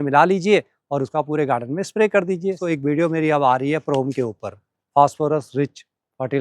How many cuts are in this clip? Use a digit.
1